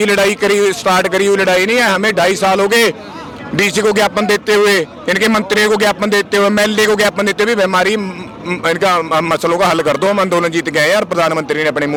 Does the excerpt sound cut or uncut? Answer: uncut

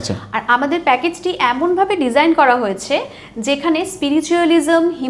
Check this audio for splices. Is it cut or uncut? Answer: uncut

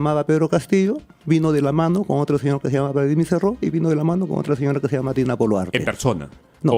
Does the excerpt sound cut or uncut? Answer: uncut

